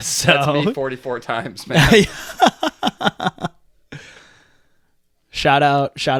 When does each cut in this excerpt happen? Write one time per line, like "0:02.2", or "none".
none